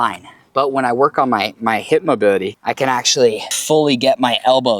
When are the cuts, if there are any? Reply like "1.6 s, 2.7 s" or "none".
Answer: 2.5 s, 3.5 s